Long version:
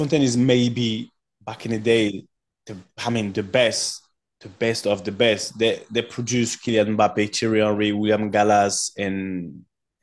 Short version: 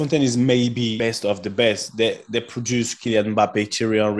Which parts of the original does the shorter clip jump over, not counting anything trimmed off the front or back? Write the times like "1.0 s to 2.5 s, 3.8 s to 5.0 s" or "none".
0.9 s to 4.6 s